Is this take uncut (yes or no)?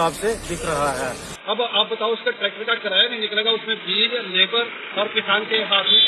no